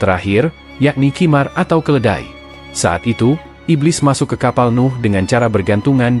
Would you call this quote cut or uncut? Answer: uncut